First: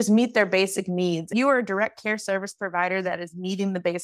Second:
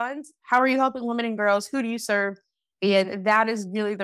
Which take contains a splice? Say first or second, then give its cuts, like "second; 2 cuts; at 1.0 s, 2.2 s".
first; 1 cut; at 1.3 s